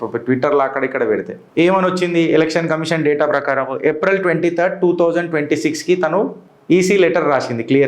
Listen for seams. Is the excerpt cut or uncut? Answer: cut